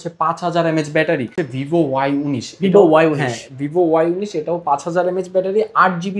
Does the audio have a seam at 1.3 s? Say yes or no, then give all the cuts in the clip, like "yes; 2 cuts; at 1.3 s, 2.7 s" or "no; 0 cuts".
yes; 1 cut; at 1.3 s